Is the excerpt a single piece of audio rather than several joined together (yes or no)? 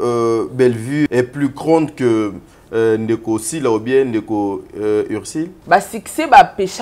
no